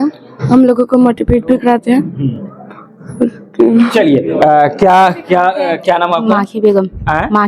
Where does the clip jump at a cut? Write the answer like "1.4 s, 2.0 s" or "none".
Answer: none